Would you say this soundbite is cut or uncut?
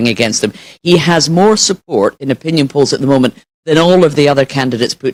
uncut